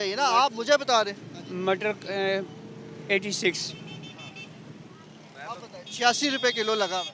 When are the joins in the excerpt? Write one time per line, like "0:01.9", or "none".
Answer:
none